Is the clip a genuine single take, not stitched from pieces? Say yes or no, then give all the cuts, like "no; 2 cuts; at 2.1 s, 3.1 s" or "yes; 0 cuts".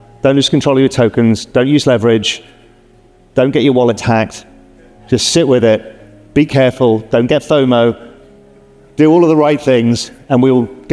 yes; 0 cuts